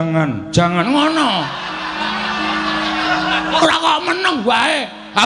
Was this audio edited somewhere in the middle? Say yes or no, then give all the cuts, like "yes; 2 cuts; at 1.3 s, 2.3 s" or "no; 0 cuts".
no; 0 cuts